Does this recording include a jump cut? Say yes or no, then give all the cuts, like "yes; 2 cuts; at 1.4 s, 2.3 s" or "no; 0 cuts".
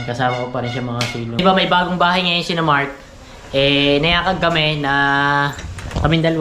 yes; 1 cut; at 1.4 s